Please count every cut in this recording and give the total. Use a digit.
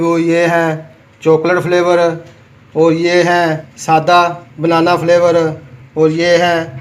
2